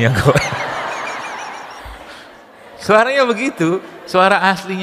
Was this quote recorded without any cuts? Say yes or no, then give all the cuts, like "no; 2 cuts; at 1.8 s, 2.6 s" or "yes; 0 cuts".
no; 1 cut; at 2.5 s